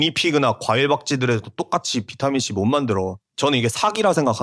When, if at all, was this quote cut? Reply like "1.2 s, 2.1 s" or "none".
3.2 s